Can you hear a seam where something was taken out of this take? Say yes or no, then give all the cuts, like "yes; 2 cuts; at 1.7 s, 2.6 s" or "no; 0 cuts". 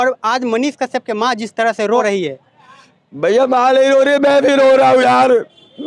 yes; 1 cut; at 2.0 s